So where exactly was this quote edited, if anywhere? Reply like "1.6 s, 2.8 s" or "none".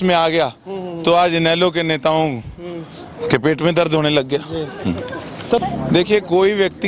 5.6 s